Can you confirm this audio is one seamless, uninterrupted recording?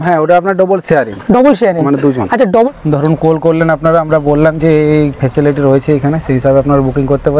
no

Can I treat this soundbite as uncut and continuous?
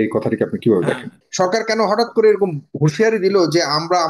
no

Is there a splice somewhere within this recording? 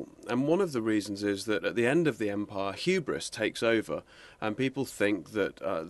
yes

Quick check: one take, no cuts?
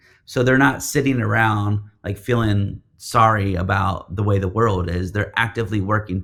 yes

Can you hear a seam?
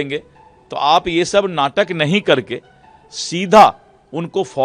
no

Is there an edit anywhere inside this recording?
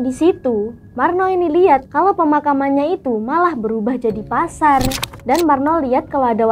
yes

